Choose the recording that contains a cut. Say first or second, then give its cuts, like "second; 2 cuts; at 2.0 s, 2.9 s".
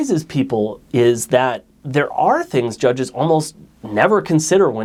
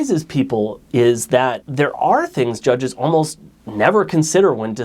second; 1 cut; at 1.6 s